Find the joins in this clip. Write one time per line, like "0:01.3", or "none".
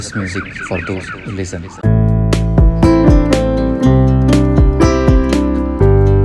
none